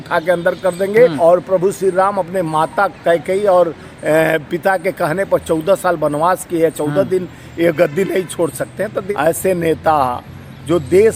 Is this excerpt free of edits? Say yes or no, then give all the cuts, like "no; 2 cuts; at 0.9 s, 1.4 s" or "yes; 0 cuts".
no; 2 cuts; at 1.2 s, 9.0 s